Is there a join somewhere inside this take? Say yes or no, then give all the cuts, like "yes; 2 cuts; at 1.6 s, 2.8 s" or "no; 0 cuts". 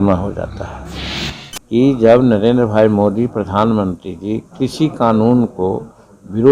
yes; 1 cut; at 1.2 s